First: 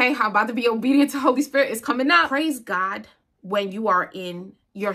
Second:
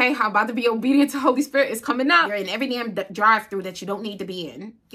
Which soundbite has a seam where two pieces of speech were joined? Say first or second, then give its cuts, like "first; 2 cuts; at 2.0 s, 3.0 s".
second; 1 cut; at 2.3 s